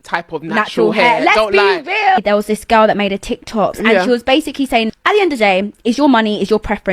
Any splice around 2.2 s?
no; 0 cuts

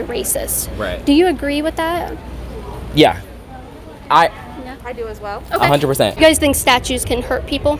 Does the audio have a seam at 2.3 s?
yes; 2 cuts; at 2.3 s, 6.1 s

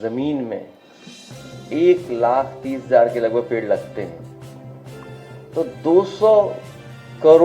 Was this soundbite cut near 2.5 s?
no; 2 cuts; at 4.2 s, 5.5 s

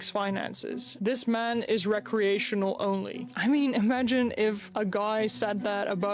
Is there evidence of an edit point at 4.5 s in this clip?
no; 1 cut; at 3.2 s

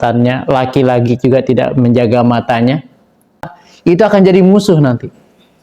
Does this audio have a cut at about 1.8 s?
no; 1 cut; at 3.5 s

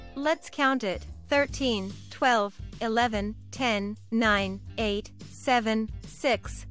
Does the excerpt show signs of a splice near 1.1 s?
yes; 1 cut; at 1.1 s

